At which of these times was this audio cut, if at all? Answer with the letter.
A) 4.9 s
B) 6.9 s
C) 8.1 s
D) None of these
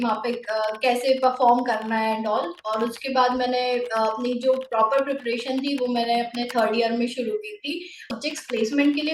C